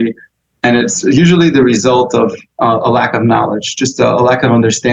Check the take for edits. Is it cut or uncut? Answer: uncut